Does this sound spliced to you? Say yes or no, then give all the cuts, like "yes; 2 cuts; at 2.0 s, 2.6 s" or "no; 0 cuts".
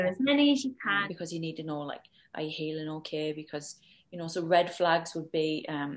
yes; 1 cut; at 1.0 s